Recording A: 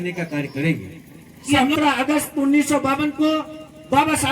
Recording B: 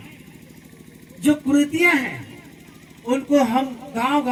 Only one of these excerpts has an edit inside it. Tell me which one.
A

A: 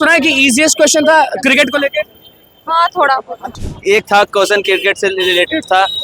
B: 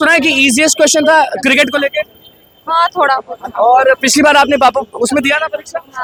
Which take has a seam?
A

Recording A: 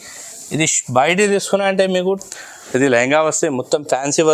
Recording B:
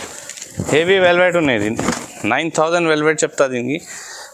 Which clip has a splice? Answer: A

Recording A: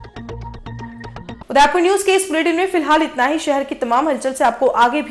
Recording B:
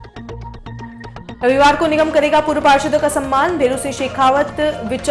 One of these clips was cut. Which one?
B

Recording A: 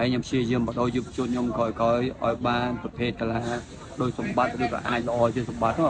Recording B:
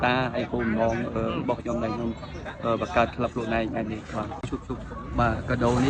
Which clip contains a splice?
B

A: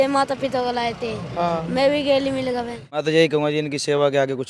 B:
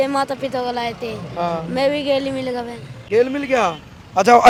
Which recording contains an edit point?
A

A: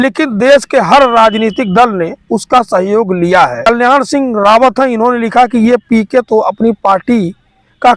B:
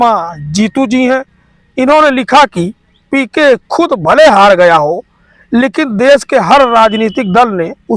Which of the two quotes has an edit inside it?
A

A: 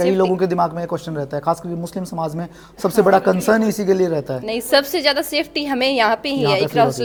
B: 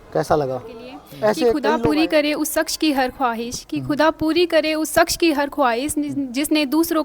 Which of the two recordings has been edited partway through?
B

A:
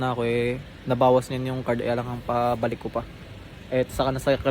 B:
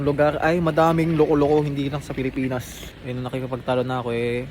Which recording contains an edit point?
B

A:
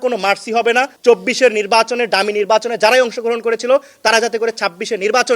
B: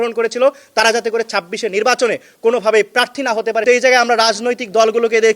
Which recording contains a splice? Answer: B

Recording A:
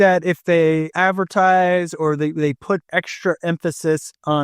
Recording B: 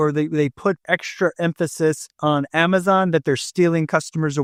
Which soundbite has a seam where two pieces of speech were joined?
A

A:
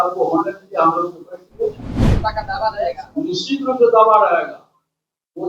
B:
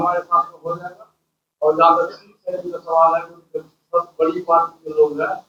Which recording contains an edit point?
A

